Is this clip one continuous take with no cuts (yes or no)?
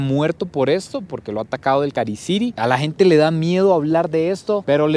no